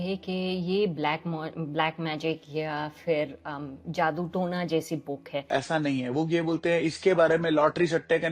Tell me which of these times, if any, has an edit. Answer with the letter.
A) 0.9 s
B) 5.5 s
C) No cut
B